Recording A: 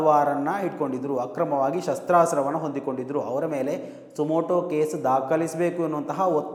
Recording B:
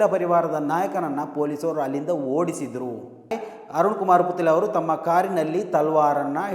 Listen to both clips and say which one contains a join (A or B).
B